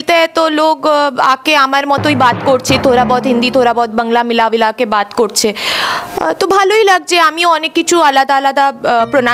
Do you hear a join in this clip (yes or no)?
no